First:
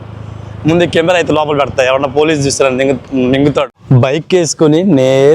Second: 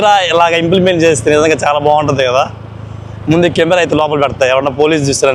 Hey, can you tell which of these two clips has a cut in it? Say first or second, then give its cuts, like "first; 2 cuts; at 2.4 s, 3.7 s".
first; 1 cut; at 3.8 s